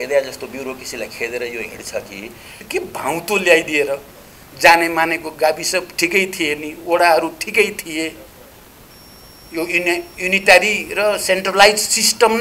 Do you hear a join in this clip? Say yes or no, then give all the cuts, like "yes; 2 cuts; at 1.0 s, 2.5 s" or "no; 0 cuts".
yes; 1 cut; at 2.6 s